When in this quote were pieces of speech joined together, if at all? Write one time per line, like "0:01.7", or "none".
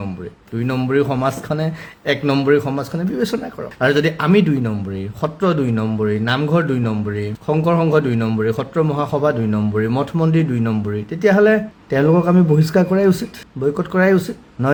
none